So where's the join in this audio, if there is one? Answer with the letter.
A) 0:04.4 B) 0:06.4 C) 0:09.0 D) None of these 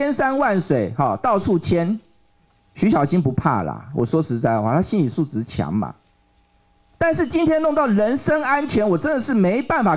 D